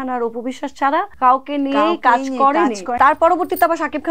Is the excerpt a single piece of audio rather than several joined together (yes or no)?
no